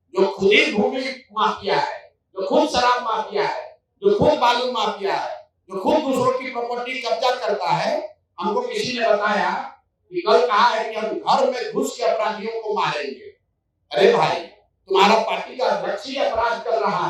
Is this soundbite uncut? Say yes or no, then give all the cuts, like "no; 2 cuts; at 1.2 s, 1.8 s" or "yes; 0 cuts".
yes; 0 cuts